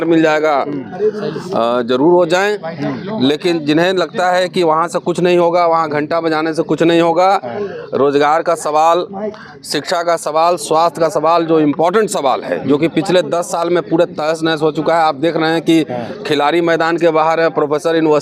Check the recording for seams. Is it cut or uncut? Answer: uncut